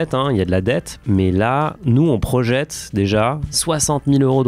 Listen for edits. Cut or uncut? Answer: cut